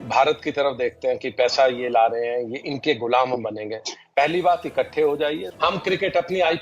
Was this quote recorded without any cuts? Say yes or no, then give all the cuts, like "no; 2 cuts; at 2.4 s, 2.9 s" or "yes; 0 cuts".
no; 1 cut; at 5.5 s